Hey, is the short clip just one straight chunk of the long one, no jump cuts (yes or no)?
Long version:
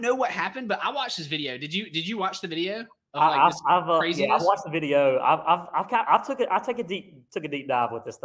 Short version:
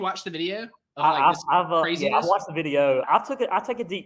no